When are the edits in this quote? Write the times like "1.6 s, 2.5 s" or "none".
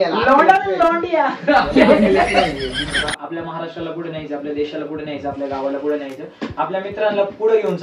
3.0 s